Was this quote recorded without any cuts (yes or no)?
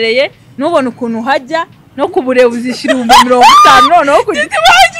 yes